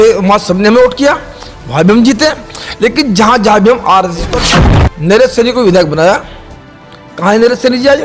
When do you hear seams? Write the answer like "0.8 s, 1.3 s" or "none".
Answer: 4.4 s